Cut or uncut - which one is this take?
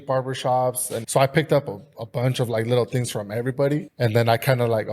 cut